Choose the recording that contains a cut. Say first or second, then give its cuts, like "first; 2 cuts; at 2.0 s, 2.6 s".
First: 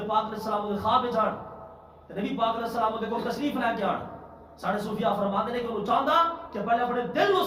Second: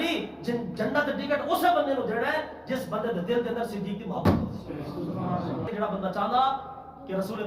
second; 1 cut; at 5.7 s